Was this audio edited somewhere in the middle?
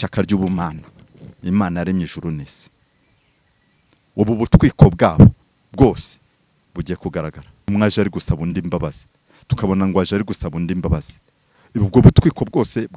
yes; 1 cut; at 7.7 s

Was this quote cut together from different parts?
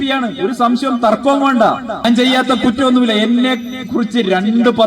yes; 1 cut; at 2.0 s

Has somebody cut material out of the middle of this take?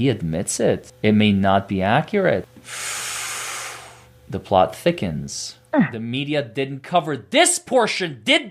yes; 2 cuts; at 0.9 s, 2.5 s

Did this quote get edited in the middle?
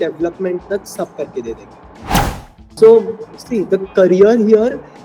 yes; 1 cut; at 2.2 s

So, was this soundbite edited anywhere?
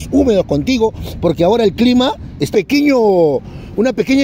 yes; 1 cut; at 2.5 s

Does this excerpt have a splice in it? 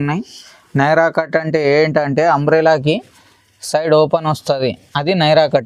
no; 0 cuts

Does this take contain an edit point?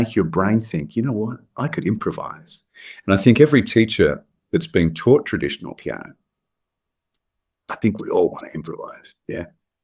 no; 0 cuts

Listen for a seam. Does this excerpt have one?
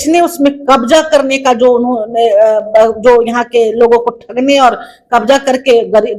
no; 0 cuts

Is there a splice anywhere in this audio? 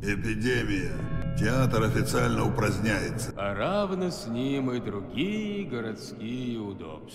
yes; 2 cuts; at 1.2 s, 3.3 s

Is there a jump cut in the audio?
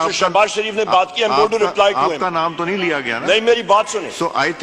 no; 0 cuts

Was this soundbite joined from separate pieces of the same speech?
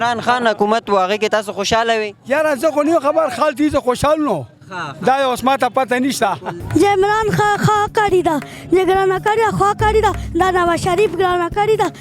yes; 1 cut; at 6.5 s

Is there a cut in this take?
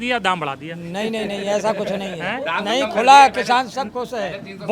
no; 0 cuts

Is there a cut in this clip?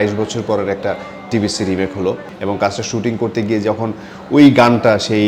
no; 0 cuts

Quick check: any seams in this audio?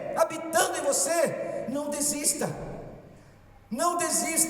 no; 0 cuts

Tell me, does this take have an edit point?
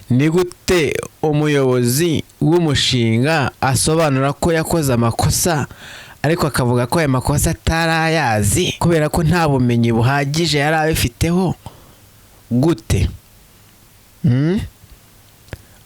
yes; 3 cuts; at 1.1 s, 2.3 s, 8.7 s

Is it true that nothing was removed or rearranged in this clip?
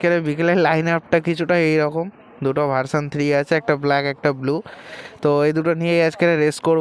yes; 0 cuts

